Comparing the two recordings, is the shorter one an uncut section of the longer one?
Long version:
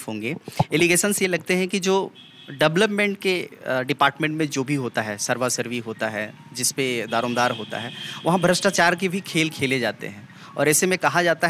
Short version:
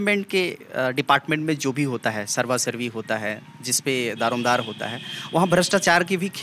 yes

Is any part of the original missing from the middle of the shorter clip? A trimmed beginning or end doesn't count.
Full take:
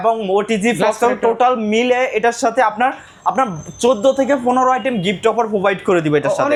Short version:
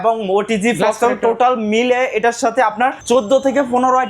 yes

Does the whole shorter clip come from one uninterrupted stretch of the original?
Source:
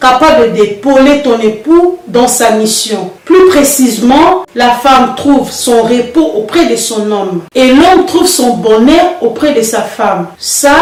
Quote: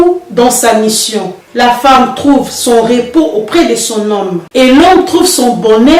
no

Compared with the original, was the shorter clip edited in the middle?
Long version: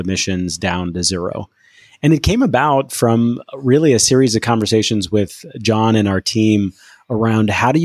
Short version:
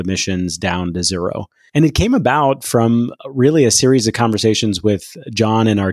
yes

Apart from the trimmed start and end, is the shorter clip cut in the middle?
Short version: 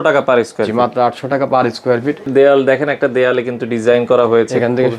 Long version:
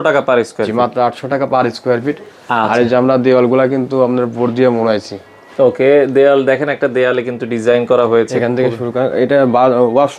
yes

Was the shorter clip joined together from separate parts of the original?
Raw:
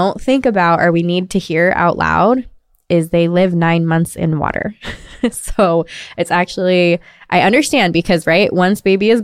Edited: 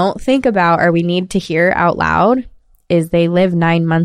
no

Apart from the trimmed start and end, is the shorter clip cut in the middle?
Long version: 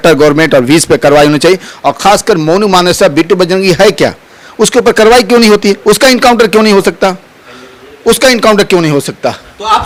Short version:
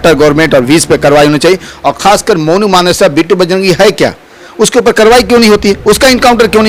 no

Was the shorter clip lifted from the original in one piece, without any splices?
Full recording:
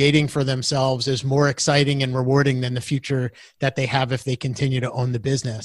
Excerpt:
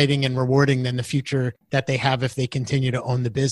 no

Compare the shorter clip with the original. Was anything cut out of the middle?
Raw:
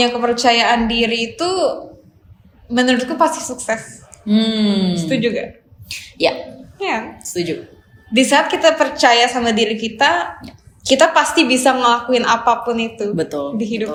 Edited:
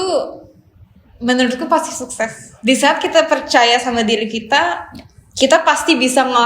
yes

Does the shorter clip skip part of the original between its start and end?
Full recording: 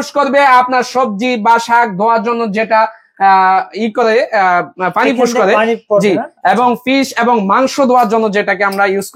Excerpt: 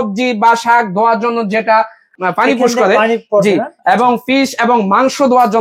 yes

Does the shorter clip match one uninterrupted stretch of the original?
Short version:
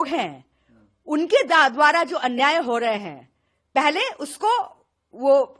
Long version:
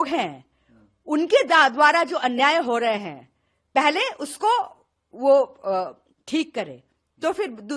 yes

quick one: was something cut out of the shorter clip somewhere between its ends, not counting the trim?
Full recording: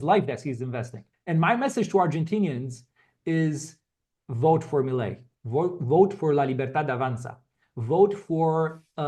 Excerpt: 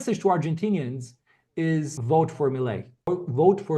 yes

